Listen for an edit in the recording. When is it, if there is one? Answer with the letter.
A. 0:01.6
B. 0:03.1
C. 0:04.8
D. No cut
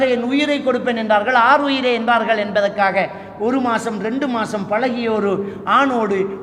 D